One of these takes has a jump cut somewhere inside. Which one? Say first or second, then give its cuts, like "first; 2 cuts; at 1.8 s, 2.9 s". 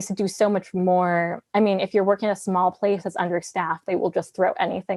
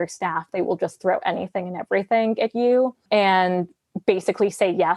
second; 1 cut; at 3.0 s